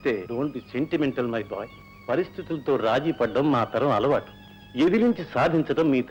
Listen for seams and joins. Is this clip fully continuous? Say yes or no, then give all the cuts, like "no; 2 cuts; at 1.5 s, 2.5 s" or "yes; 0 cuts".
yes; 0 cuts